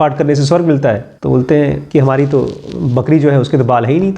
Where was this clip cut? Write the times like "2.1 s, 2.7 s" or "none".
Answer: 1.1 s, 1.8 s